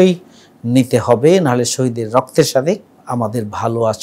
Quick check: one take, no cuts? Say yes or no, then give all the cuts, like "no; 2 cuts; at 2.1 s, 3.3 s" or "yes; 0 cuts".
no; 1 cut; at 2.9 s